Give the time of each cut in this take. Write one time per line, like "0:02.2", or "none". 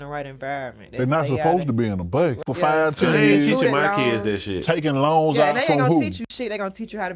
0:02.5